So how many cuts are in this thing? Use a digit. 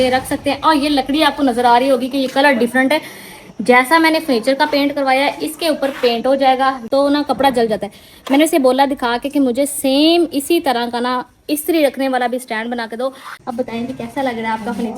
2